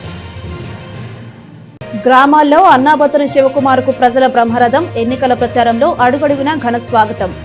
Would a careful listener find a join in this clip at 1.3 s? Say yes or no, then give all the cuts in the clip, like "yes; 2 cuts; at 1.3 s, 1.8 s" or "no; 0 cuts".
yes; 1 cut; at 1.3 s